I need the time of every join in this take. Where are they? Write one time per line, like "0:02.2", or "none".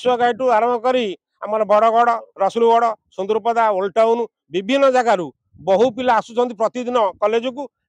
none

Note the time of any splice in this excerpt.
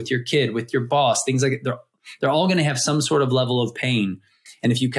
none

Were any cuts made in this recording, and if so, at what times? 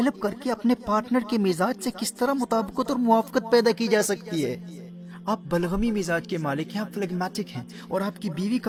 none

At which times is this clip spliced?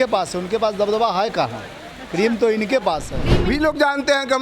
0:03.2

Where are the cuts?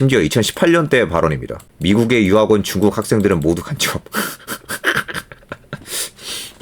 0:01.7

